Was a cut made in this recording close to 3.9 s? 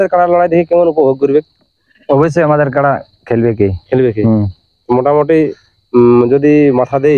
no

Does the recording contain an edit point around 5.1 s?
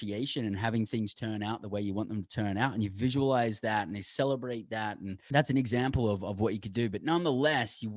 yes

